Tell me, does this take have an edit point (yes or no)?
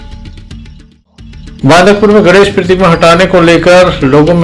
yes